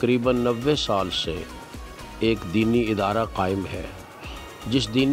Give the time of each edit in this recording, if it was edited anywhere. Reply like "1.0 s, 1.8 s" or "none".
none